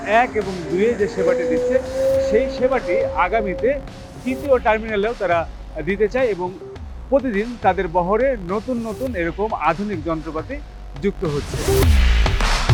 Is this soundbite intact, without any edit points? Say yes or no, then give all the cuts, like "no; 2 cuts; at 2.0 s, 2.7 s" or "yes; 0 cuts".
yes; 0 cuts